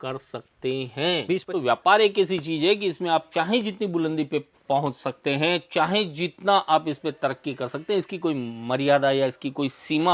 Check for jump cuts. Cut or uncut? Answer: cut